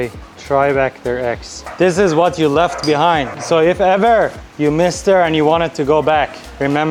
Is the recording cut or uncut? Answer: uncut